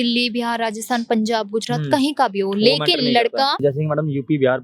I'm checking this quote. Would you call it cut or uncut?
cut